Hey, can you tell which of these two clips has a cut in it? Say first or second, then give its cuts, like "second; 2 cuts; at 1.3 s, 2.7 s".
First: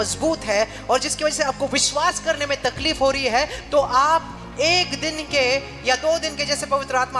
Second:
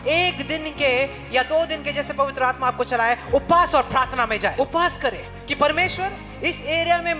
second; 2 cuts; at 4.5 s, 5.3 s